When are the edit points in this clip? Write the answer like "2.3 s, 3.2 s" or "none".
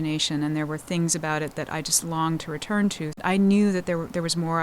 3.2 s